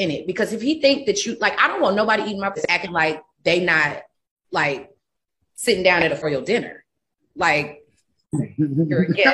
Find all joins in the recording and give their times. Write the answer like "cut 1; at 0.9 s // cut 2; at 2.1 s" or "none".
cut 1; at 2.6 s // cut 2; at 6.2 s